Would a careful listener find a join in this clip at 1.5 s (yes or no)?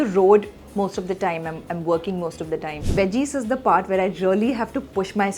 no